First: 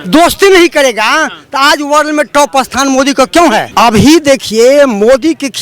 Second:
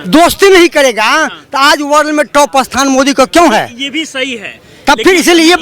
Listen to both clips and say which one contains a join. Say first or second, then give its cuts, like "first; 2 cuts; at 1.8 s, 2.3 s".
first; 1 cut; at 3.7 s